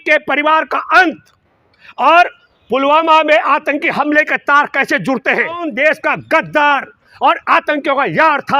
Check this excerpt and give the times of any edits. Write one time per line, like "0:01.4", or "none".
0:05.7